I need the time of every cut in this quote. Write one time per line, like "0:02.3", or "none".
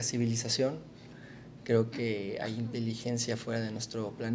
none